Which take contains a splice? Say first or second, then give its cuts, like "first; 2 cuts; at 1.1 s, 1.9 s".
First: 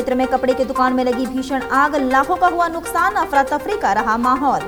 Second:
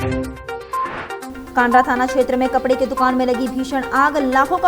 second; 1 cut; at 1.3 s